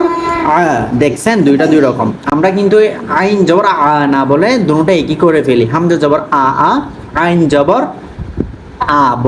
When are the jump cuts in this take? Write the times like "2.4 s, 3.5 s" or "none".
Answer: none